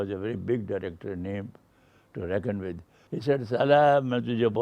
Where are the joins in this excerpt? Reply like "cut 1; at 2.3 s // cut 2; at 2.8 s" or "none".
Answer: cut 1; at 2.9 s